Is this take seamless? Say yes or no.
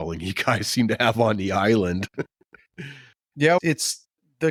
yes